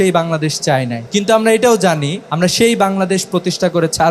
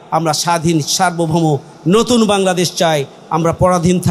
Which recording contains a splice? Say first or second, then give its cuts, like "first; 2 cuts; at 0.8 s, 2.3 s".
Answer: first; 2 cuts; at 1.0 s, 2.2 s